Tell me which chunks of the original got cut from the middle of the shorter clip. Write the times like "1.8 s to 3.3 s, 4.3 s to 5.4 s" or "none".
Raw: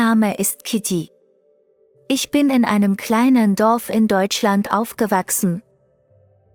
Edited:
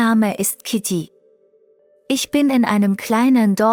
none